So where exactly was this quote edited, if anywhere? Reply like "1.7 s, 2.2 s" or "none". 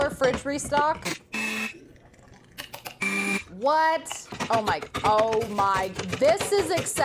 1.0 s, 4.3 s